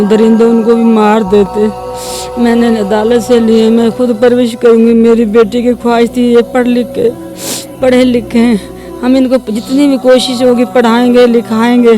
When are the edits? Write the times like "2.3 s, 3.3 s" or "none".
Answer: none